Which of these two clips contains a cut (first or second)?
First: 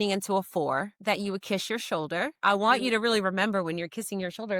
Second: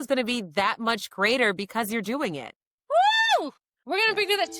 first